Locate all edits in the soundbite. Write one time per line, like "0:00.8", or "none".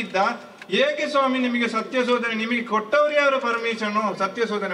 none